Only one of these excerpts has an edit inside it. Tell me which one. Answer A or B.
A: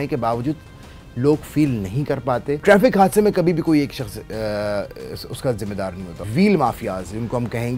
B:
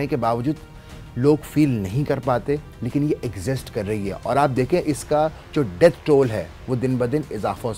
A